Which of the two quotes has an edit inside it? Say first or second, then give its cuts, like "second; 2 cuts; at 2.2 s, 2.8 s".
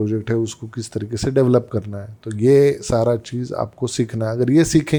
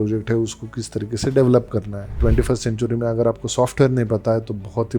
second; 1 cut; at 2.2 s